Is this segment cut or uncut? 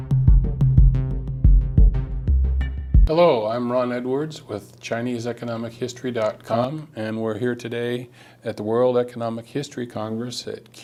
uncut